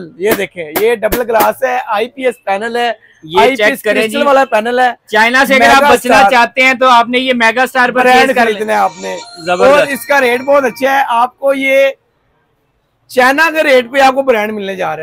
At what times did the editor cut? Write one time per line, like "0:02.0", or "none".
none